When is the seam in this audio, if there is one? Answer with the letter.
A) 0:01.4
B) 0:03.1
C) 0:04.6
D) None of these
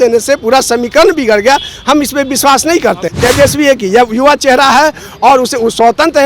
B